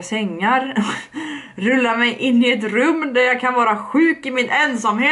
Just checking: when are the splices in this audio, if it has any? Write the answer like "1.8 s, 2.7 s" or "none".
none